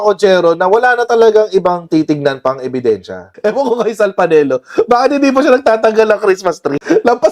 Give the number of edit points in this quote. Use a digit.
1